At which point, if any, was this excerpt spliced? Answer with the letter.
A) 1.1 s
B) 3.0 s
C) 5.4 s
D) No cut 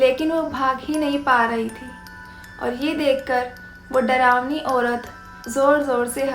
C